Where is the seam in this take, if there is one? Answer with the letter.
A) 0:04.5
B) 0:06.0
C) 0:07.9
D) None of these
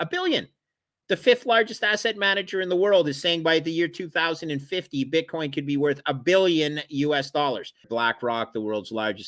C